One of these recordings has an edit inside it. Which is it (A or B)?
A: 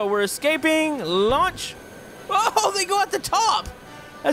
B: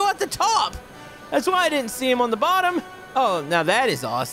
B